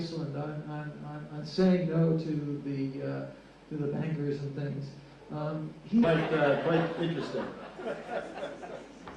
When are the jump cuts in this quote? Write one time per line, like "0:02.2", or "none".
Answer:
none